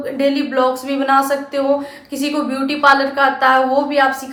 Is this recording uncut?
yes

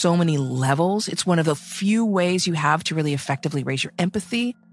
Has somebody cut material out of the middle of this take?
no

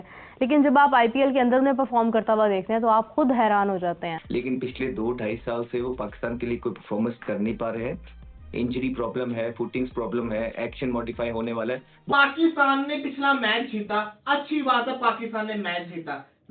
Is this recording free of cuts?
no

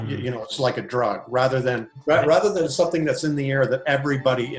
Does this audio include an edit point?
yes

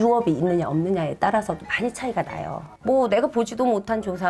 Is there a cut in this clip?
yes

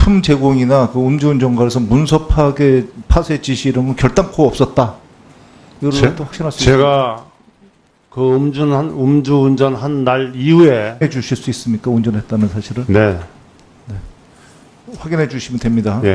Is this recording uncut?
yes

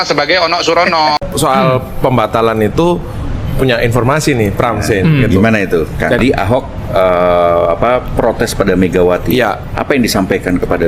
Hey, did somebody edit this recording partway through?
yes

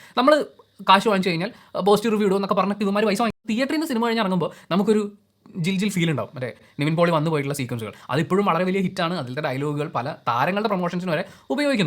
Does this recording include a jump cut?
yes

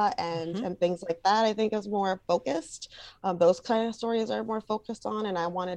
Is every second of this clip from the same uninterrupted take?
yes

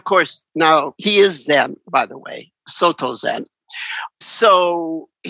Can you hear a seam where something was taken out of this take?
yes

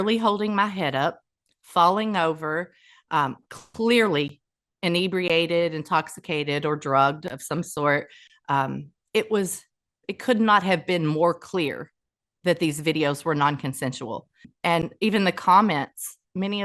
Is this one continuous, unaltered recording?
no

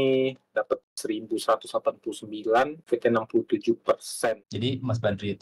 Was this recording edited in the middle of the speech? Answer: yes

